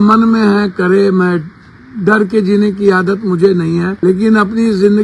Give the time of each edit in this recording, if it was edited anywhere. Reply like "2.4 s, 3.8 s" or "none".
4.0 s